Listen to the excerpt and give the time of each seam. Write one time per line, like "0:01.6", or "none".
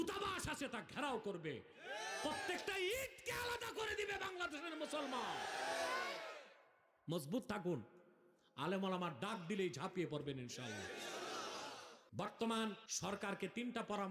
0:12.0
0:12.9